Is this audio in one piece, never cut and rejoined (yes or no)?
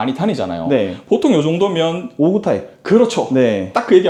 yes